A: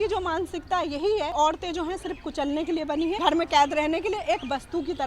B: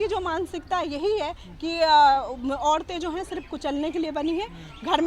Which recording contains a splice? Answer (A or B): A